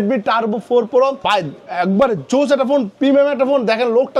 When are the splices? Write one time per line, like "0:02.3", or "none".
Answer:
0:01.2